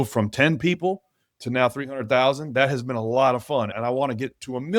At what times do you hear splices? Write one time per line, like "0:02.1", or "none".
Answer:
0:03.7